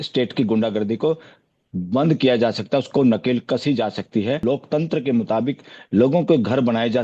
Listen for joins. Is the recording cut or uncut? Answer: cut